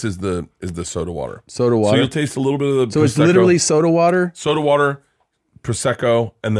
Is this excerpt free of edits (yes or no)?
yes